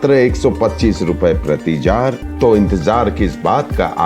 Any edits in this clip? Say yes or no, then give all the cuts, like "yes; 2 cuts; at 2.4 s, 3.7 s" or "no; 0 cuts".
yes; 1 cut; at 2.2 s